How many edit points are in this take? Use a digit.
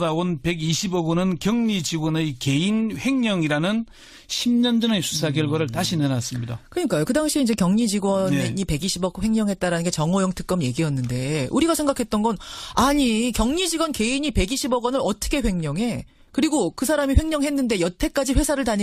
1